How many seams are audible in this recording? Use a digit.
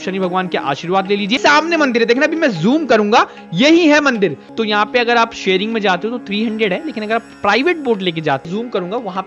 3